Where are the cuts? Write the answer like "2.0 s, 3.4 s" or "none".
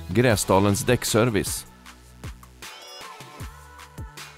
1.5 s